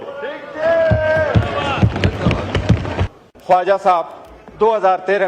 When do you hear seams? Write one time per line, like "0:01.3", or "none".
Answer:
0:03.2